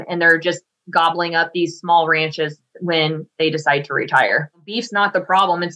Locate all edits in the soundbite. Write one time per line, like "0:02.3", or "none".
0:04.8